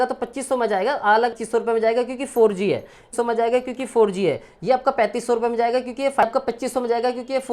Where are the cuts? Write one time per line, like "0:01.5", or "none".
0:01.4
0:03.1
0:06.2